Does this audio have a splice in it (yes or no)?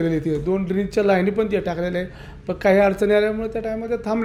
no